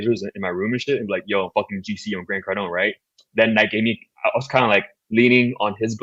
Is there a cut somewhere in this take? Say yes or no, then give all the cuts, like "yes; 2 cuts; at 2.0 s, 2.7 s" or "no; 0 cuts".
no; 0 cuts